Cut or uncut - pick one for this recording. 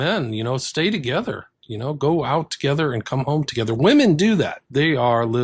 uncut